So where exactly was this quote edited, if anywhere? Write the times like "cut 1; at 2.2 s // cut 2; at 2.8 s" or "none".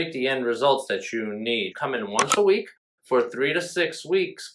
cut 1; at 1.7 s